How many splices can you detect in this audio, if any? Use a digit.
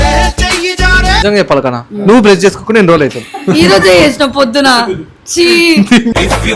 1